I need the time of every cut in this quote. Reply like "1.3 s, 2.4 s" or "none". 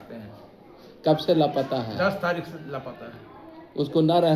none